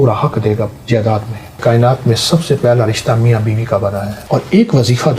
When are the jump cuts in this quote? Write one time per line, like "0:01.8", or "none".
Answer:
0:01.6
0:04.2